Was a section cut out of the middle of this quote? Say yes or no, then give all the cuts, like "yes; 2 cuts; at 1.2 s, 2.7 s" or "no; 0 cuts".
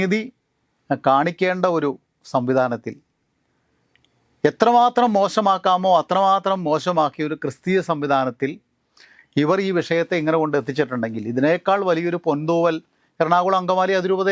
no; 0 cuts